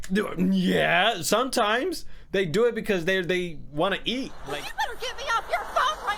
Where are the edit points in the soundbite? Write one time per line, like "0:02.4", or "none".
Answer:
0:04.4